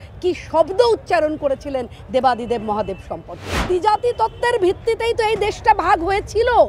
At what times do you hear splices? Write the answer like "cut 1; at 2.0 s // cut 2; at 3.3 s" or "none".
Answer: cut 1; at 3.6 s